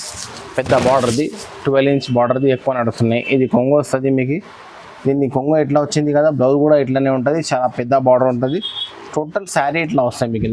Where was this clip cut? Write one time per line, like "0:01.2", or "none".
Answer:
none